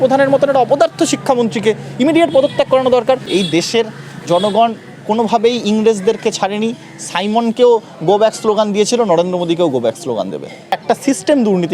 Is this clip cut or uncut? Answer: cut